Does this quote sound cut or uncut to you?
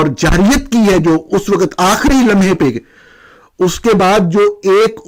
uncut